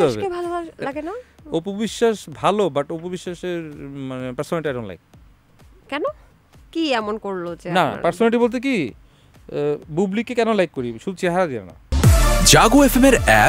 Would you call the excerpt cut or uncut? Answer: cut